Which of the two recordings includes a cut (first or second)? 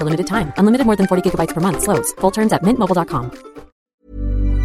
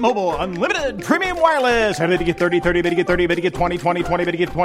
first